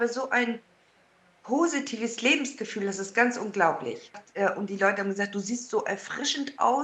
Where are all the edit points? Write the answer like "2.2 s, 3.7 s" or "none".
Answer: 4.2 s